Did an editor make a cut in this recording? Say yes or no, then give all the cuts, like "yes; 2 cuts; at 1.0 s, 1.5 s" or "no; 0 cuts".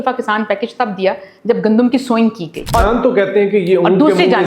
yes; 1 cut; at 2.7 s